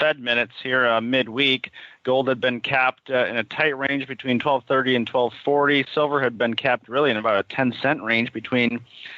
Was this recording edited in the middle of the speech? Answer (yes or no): yes